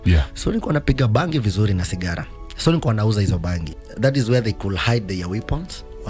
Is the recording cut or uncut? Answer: cut